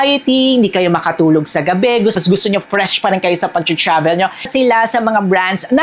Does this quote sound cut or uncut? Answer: cut